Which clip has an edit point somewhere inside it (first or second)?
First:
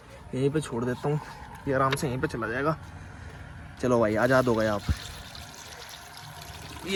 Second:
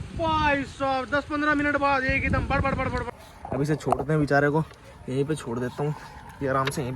second